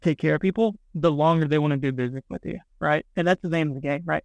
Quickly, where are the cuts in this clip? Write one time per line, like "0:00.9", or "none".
none